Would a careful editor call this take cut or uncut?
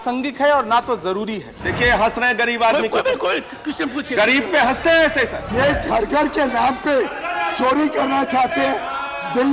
cut